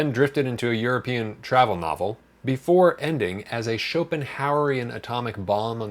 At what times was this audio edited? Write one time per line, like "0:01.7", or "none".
0:02.3